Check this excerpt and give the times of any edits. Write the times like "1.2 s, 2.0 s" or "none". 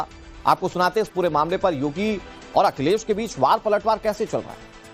none